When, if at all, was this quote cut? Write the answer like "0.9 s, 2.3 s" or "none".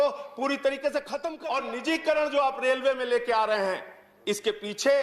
1.3 s